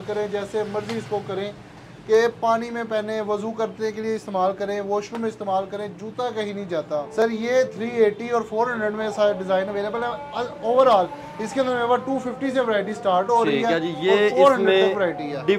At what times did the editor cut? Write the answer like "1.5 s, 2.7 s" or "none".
none